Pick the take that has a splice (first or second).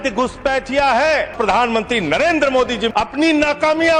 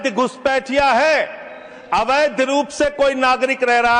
first